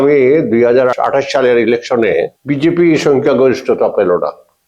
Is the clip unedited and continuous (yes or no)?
no